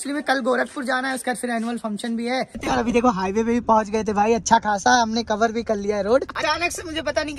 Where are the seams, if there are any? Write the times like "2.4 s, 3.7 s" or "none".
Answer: 2.7 s, 6.3 s